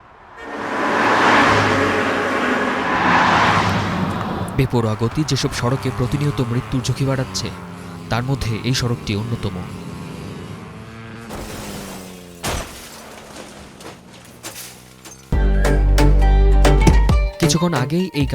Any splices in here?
yes; 1 cut; at 15.3 s

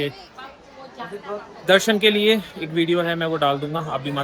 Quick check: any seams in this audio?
no; 0 cuts

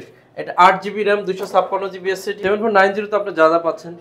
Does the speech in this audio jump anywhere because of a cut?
yes; 1 cut; at 2.3 s

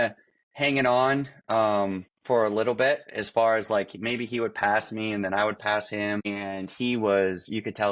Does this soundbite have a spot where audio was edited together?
no; 0 cuts

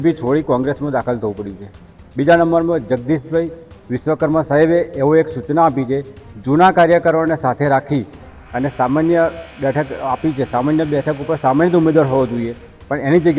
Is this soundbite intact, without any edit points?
yes; 0 cuts

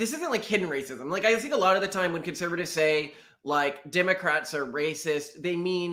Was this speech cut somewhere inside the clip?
no; 0 cuts

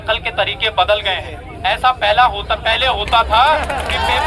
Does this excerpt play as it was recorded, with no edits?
yes; 0 cuts

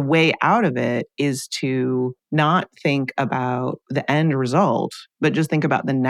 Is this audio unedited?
no; 3 cuts; at 2.2 s, 3.8 s, 5.0 s

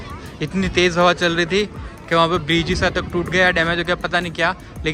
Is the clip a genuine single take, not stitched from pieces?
yes; 0 cuts

